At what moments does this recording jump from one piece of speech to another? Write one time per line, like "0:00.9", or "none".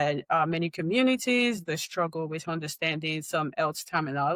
none